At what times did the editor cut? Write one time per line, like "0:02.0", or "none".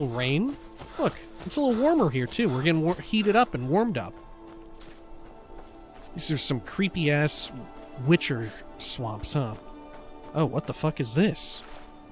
0:04.2

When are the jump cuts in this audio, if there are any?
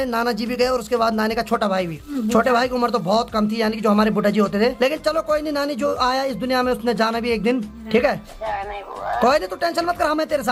none

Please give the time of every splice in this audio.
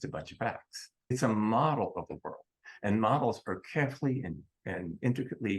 0:01.1
0:04.6

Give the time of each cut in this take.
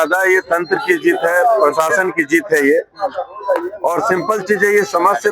none

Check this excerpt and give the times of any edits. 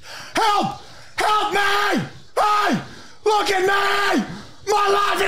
none

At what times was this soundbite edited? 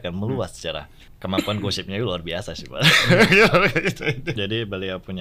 0:01.1
0:04.3

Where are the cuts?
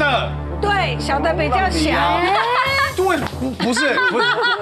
none

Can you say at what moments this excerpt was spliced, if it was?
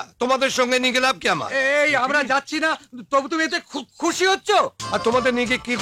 0:04.8

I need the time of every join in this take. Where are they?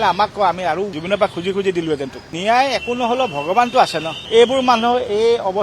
0:02.3
0:04.2

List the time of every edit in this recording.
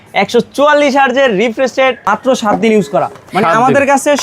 0:02.0

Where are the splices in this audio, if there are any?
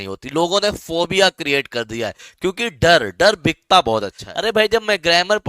0:04.2

